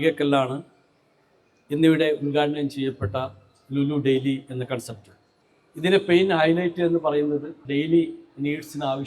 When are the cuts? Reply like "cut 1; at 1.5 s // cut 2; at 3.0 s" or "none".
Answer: cut 1; at 7.6 s

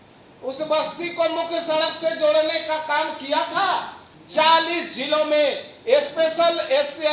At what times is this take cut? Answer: none

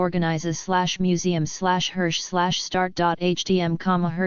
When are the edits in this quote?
cut 1; at 1.8 s

